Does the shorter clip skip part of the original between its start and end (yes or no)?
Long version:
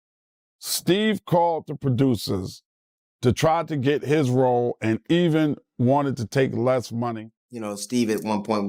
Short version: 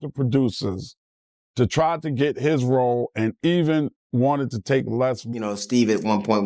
yes